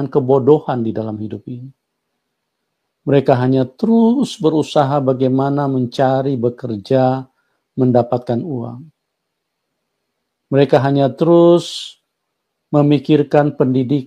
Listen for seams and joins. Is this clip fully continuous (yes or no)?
yes